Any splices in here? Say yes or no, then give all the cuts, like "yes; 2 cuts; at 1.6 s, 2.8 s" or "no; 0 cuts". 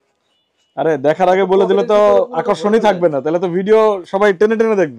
no; 0 cuts